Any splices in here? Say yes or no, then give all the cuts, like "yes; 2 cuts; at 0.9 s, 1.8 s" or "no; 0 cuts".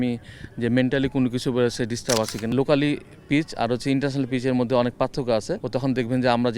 yes; 2 cuts; at 2.5 s, 5.6 s